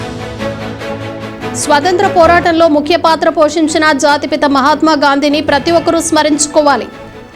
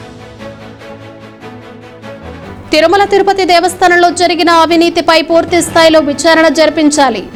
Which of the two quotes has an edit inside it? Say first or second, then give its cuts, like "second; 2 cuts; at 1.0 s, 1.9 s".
first; 1 cut; at 1.6 s